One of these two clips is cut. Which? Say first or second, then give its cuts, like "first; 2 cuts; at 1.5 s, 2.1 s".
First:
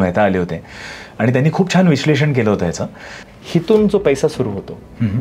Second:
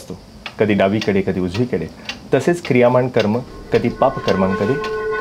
first; 1 cut; at 3.2 s